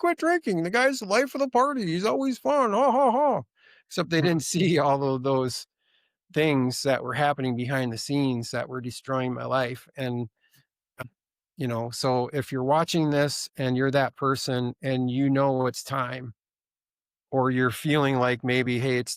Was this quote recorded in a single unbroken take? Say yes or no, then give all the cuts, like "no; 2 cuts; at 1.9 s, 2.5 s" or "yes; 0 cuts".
yes; 0 cuts